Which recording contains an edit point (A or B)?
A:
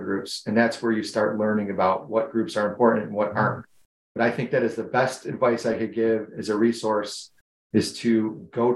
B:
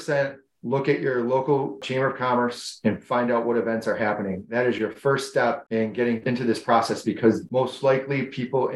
B